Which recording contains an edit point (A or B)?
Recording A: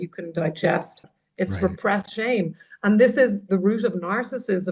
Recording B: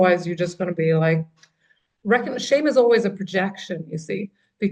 A